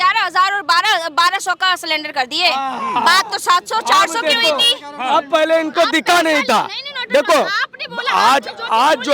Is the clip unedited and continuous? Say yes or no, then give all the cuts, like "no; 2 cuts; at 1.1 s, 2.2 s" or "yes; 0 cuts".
yes; 0 cuts